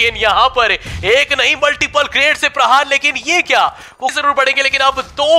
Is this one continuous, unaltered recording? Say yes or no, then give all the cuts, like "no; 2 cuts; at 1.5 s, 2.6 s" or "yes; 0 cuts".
no; 1 cut; at 4.2 s